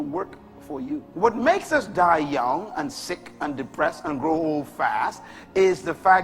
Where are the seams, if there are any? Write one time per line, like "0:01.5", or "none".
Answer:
0:01.1